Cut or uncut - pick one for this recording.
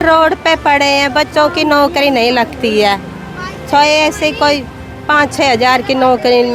uncut